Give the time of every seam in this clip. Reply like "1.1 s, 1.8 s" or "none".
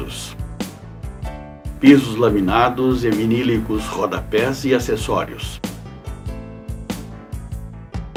none

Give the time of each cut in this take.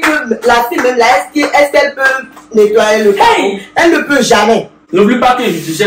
4.8 s

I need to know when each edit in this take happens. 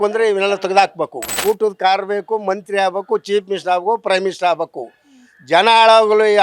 1.4 s

